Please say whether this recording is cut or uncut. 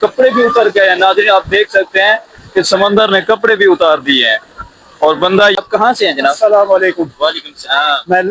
cut